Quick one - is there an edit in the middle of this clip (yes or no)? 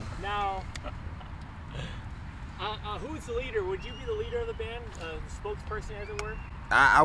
no